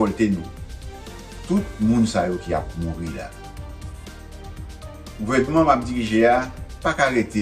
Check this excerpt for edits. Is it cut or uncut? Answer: cut